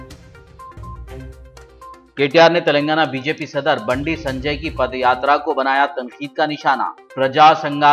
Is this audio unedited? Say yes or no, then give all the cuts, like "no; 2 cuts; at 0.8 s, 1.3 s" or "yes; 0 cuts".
yes; 0 cuts